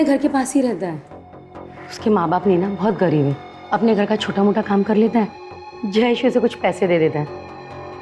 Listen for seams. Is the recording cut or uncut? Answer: uncut